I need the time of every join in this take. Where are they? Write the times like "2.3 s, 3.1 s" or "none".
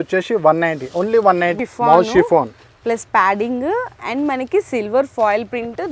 1.5 s